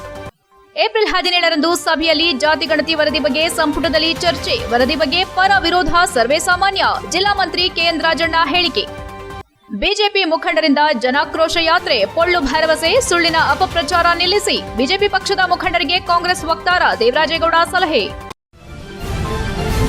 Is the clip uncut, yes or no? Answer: no